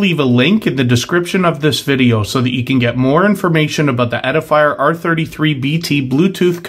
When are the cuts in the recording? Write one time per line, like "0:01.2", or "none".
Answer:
none